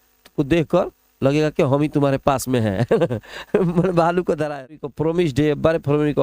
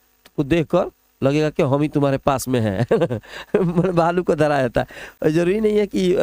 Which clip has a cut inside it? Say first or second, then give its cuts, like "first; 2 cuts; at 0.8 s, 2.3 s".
first; 1 cut; at 4.9 s